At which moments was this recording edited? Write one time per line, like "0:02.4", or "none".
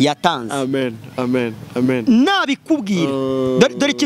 none